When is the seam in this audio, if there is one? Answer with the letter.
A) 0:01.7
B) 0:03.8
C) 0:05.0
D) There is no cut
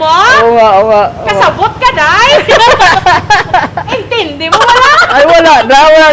B